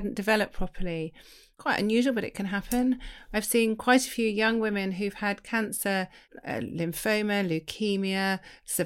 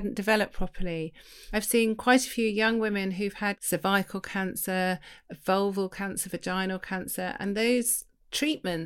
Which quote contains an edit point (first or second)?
second